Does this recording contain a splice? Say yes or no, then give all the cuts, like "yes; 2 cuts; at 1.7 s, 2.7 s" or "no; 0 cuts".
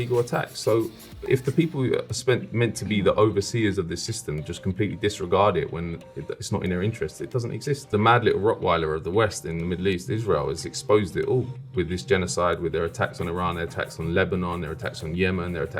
yes; 2 cuts; at 1.2 s, 7.8 s